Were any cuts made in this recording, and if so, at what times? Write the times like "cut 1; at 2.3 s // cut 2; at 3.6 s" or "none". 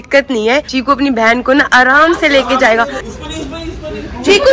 cut 1; at 3.0 s